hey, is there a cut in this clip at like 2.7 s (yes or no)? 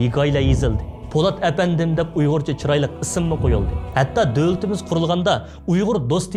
no